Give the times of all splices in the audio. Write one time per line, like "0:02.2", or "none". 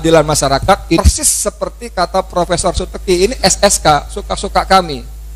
0:01.0